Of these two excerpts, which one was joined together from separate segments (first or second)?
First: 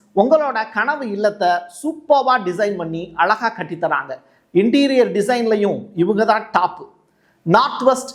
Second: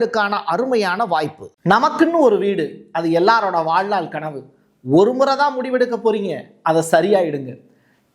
second